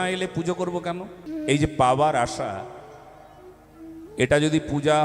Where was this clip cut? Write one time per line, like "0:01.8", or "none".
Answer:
0:01.2